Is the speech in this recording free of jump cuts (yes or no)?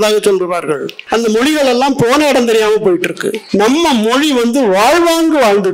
no